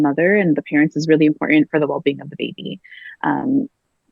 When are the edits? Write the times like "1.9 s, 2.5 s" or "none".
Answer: none